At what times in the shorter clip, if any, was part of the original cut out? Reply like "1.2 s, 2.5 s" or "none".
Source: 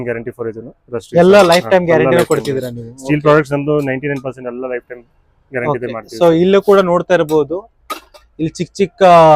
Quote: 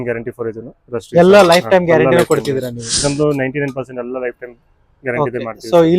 3.0 s